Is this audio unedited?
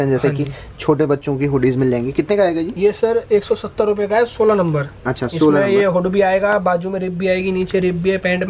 yes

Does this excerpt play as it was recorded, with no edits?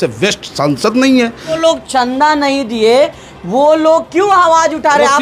no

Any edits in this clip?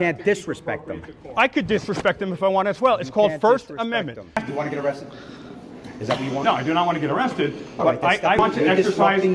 no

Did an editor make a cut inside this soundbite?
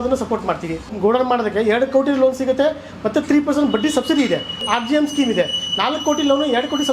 yes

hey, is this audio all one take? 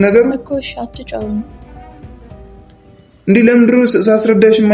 yes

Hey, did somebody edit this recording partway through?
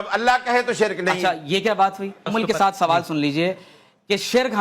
yes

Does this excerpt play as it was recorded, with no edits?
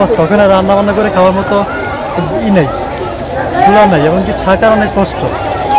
yes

